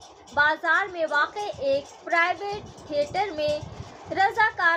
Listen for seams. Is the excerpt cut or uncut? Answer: uncut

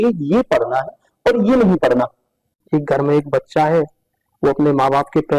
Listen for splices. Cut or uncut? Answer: cut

